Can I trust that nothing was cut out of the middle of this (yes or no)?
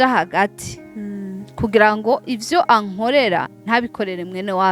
yes